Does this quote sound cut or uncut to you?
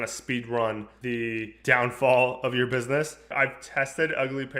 cut